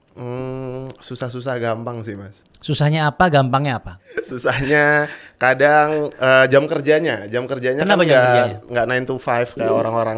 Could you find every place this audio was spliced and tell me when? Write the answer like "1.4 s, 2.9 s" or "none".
4.3 s